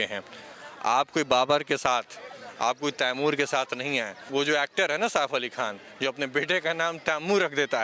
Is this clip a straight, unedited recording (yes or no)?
no